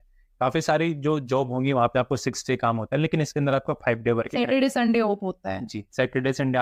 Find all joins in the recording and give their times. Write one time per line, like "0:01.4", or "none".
none